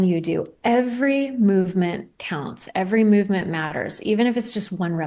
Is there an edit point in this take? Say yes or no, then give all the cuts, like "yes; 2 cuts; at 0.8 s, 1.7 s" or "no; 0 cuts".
no; 0 cuts